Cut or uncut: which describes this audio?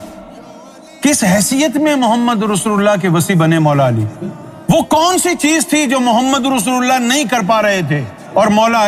uncut